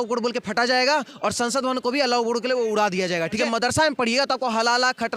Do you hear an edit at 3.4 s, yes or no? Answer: yes